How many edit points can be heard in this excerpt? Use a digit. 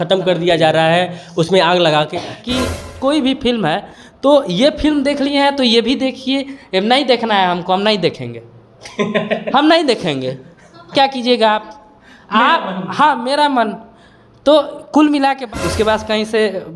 2